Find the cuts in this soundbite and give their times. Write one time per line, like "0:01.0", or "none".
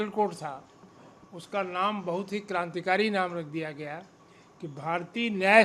none

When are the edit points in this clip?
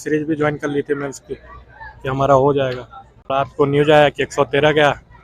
0:03.3

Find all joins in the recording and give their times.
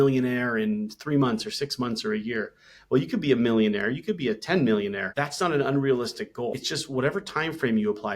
0:05.0
0:06.6

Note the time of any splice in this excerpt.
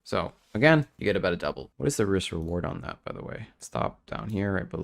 0:01.7

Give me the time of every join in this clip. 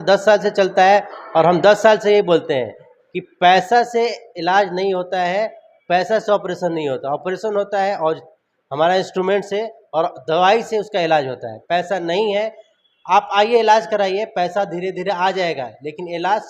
none

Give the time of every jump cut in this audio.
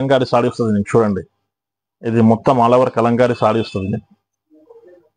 none

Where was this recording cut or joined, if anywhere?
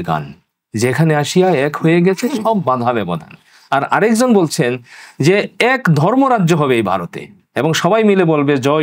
none

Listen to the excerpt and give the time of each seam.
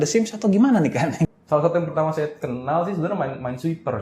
0:01.2

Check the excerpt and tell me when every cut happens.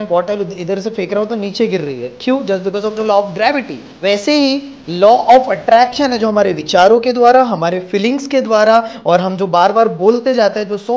0:03.9

